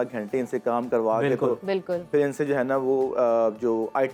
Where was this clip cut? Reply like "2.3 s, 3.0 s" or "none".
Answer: none